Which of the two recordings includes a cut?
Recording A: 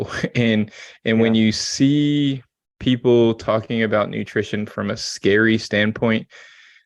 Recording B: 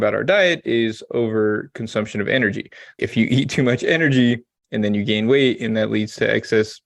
B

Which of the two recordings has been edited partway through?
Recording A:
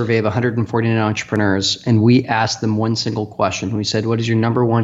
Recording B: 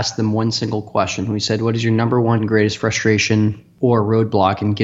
B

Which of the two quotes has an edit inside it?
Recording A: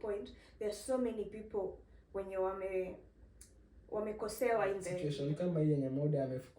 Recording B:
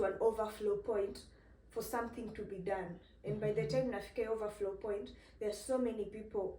A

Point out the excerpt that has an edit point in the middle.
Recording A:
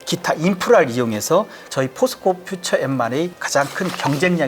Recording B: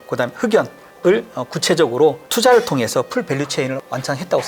A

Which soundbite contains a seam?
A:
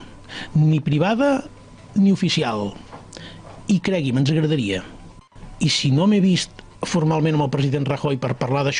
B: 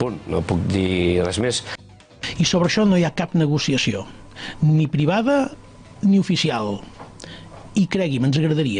B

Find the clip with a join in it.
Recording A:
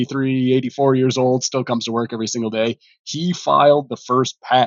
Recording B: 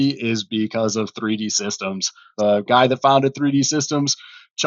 B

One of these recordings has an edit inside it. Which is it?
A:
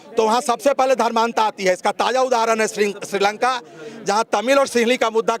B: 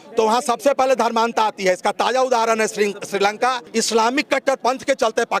B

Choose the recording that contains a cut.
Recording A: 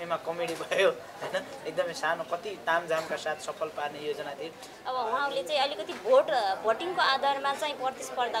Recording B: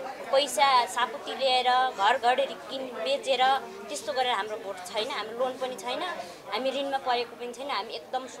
A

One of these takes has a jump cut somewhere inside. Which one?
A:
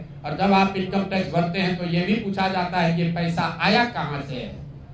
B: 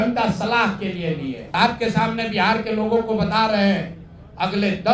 B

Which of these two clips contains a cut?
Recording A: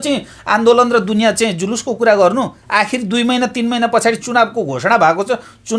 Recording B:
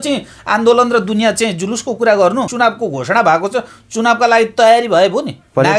B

